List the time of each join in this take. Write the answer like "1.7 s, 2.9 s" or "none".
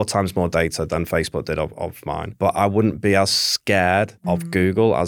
none

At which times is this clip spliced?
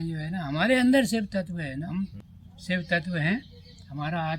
1.9 s

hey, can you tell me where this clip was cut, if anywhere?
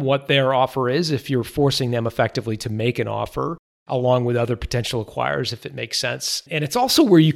6.4 s

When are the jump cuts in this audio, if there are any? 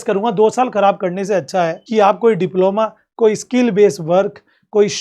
1.8 s

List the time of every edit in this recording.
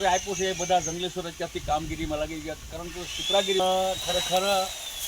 3.6 s

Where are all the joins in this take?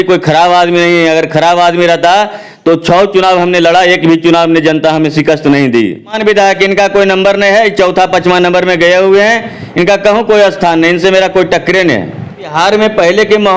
6.2 s, 12.5 s

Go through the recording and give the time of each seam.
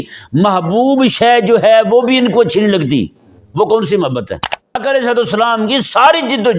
4.8 s

